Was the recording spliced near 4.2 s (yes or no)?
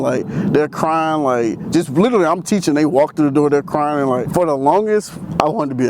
yes